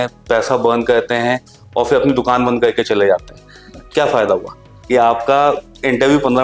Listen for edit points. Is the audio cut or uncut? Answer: cut